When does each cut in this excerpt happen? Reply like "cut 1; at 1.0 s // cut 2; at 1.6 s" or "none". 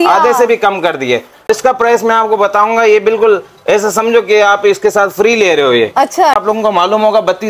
cut 1; at 1.5 s // cut 2; at 6.4 s